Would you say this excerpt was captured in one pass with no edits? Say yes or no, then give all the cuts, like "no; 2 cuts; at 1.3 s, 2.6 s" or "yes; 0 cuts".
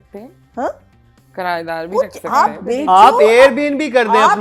yes; 0 cuts